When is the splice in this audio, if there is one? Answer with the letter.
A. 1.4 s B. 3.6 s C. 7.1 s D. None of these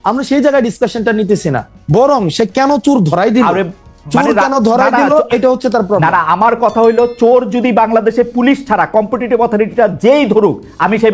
D